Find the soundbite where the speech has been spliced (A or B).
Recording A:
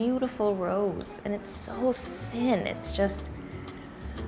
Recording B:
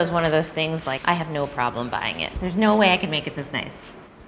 B